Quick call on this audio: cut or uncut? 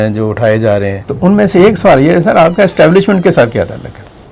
cut